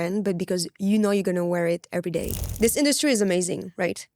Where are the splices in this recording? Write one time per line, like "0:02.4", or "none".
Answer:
0:02.4

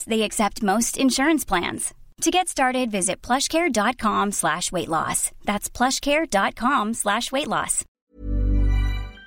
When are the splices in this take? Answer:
0:08.1

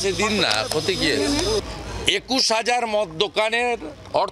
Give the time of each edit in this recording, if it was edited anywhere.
0:01.6

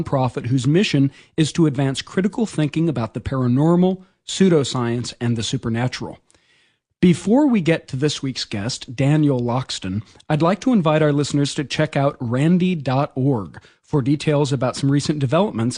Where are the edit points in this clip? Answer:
none

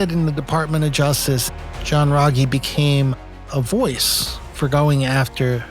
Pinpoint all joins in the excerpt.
0:01.5

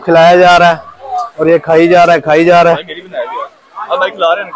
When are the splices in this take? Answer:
none

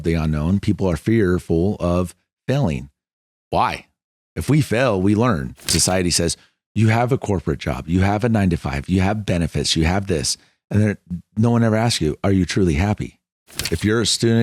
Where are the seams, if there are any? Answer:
0:05.7
0:13.6

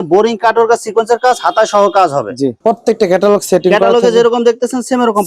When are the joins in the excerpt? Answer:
0:02.6

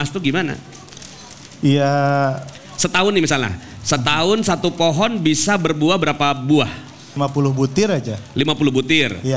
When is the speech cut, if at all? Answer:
0:07.2

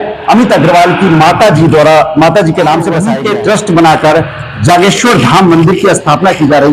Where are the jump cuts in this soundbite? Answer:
0:03.1

